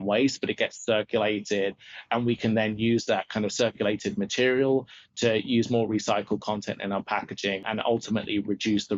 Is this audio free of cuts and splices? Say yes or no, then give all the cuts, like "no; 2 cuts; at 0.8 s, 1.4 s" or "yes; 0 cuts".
no; 1 cut; at 7.6 s